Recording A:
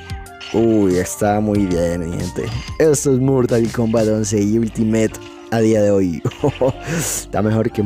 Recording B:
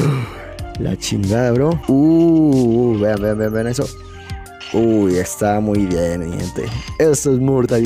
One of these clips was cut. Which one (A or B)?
B